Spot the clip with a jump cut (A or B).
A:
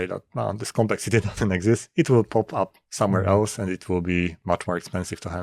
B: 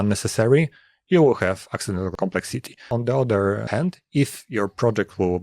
B